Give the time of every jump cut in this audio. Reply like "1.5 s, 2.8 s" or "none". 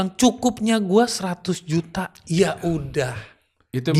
none